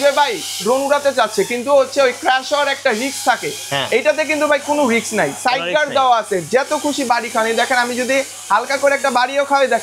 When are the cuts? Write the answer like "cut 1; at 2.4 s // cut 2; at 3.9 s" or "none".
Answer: none

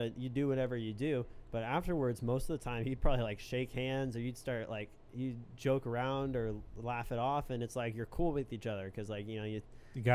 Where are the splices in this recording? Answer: none

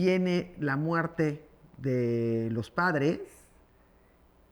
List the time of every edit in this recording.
none

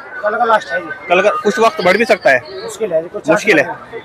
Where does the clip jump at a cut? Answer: none

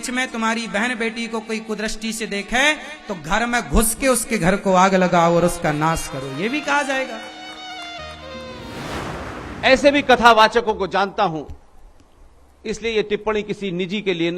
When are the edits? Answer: cut 1; at 8.9 s

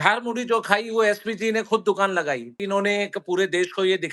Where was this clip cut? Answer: cut 1; at 2.6 s

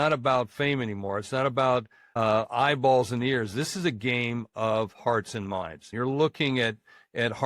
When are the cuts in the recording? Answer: cut 1; at 2.0 s // cut 2; at 5.8 s

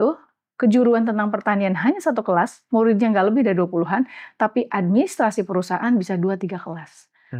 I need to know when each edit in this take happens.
none

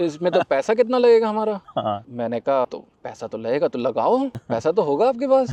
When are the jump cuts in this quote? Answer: none

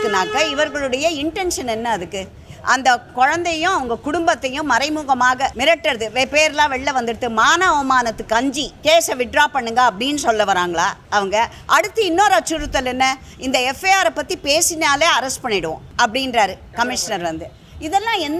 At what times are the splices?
cut 1; at 5.6 s // cut 2; at 8.7 s // cut 3; at 11.0 s // cut 4; at 15.8 s

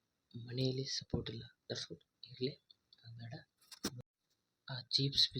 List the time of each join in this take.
cut 1; at 4.0 s

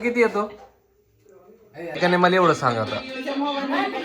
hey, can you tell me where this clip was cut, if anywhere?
cut 1; at 2.0 s

